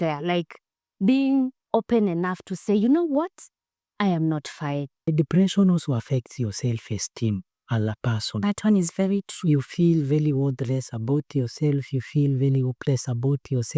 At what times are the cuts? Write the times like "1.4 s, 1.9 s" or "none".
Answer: 5.1 s